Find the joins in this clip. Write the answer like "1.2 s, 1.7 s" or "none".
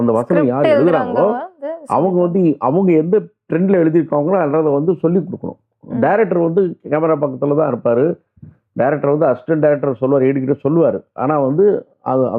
none